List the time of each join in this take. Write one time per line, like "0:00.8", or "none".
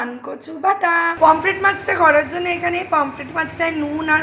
0:01.1